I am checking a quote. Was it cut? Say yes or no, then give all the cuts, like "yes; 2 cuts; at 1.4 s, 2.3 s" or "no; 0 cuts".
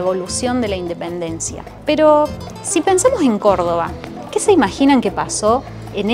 no; 0 cuts